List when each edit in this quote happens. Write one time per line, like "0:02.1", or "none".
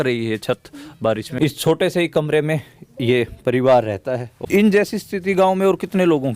0:01.3
0:04.3